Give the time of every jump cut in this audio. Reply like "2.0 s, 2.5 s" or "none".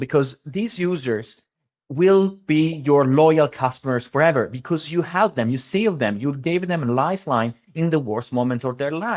none